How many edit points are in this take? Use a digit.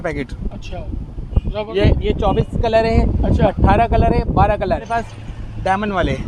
2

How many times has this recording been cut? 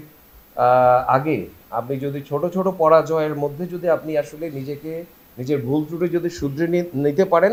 0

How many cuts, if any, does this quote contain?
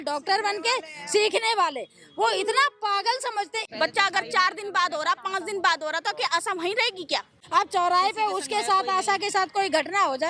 2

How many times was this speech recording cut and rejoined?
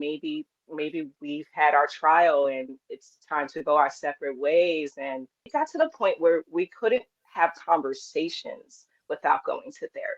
2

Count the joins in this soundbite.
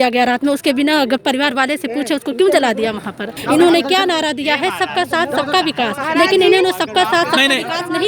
1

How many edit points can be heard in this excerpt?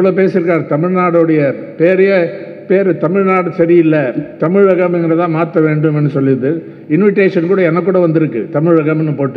0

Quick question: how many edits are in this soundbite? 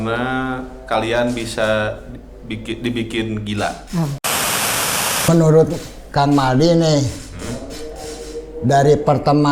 1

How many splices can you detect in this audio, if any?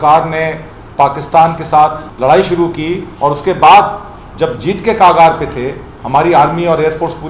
1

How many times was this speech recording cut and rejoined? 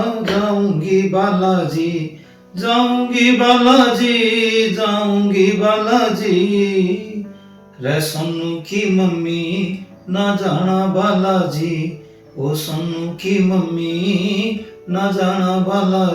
0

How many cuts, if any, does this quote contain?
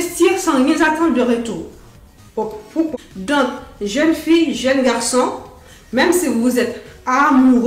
1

